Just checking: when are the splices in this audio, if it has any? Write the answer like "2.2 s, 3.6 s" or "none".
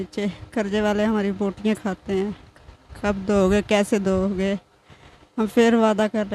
none